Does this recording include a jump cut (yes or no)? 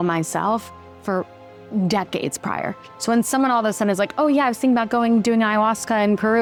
no